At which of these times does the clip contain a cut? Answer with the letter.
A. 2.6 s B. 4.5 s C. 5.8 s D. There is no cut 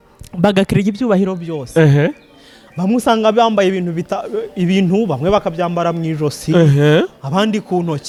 D